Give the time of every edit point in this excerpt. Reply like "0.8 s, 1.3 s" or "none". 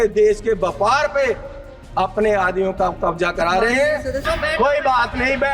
4.2 s